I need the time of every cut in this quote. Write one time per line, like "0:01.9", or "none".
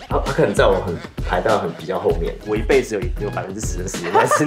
0:02.4

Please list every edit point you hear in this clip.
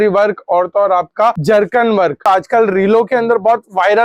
0:01.4
0:02.2

